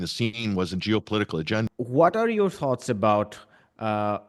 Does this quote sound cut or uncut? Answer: cut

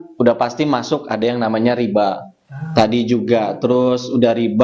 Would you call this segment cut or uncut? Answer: uncut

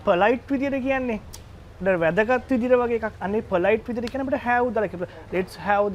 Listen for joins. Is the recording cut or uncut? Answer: uncut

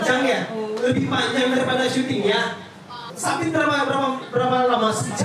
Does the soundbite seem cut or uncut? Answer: cut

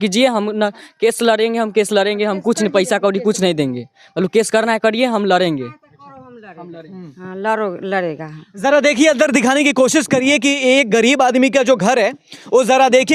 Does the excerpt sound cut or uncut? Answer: uncut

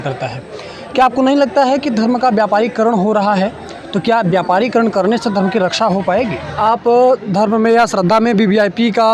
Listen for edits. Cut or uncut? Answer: cut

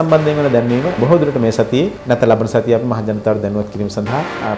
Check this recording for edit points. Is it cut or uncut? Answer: cut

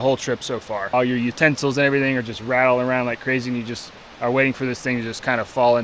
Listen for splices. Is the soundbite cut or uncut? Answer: cut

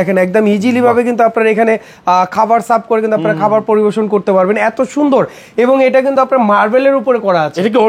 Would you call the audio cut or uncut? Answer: uncut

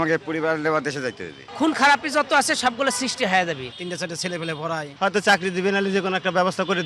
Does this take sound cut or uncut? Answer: cut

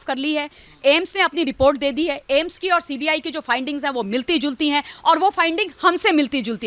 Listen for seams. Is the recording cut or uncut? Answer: uncut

